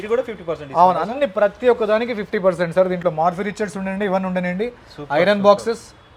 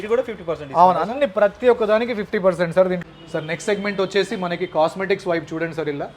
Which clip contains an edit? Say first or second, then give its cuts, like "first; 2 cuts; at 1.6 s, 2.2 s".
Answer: second; 1 cut; at 3.0 s